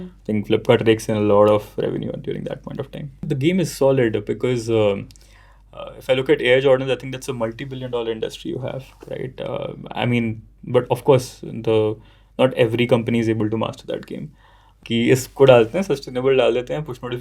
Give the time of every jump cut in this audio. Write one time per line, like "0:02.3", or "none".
0:03.3
0:14.8